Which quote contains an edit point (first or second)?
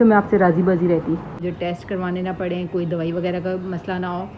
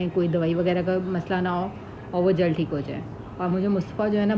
first